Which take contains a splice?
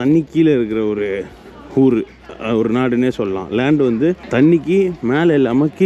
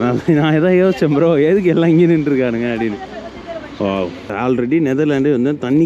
second; 1 cut; at 4.3 s

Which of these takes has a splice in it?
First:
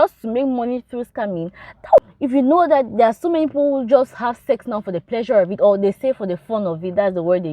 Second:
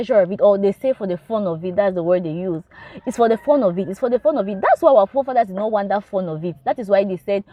first; 1 cut; at 2.0 s

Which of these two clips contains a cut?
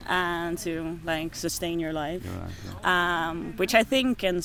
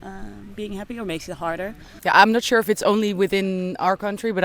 second; 1 cut; at 1.9 s

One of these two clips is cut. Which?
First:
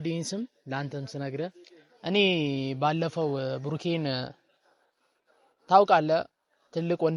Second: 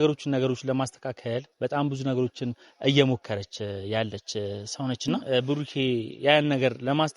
second; 1 cut; at 5.2 s

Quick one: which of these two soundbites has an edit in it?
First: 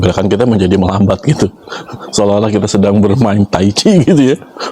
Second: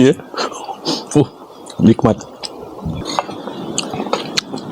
second; 1 cut; at 3.0 s

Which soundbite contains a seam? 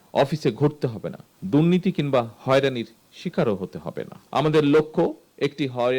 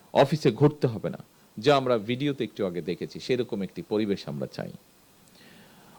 first; 2 cuts; at 1.3 s, 4.2 s

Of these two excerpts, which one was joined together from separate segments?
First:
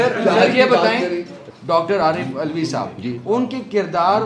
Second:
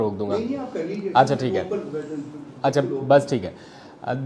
first; 1 cut; at 1.4 s

